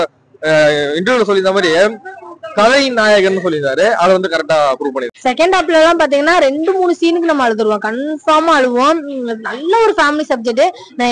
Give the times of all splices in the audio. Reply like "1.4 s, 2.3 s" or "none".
5.1 s